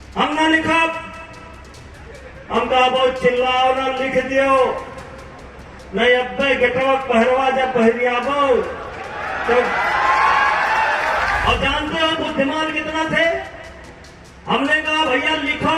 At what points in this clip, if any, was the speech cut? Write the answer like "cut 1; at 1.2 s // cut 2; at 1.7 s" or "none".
cut 1; at 11.4 s